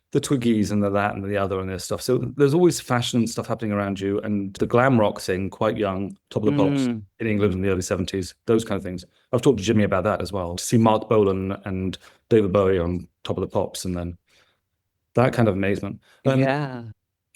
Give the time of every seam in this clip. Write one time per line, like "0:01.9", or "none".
none